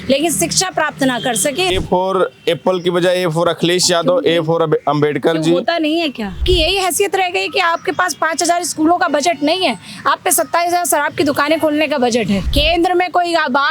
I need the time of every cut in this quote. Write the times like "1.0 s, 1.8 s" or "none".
1.7 s, 6.4 s, 12.5 s